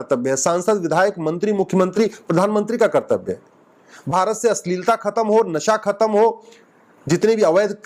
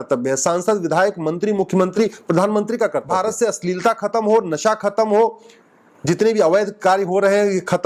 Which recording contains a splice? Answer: second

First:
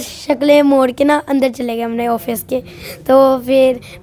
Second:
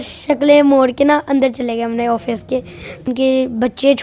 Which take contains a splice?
second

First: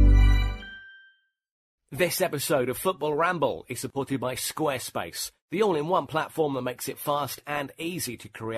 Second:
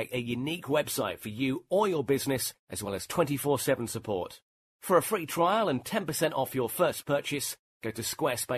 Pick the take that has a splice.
first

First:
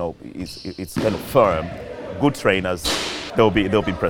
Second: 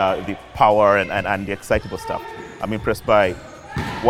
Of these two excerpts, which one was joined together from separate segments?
first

